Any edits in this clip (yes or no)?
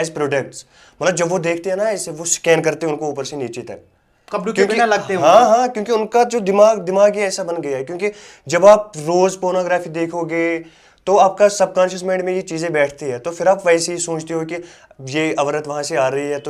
no